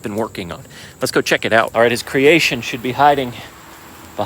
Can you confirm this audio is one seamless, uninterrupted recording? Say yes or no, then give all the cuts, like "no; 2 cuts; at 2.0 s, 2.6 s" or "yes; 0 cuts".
no; 1 cut; at 1.7 s